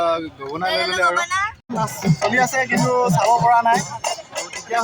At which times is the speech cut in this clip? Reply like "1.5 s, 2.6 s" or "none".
1.6 s